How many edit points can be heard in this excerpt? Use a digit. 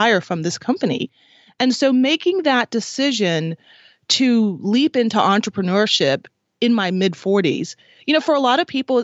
0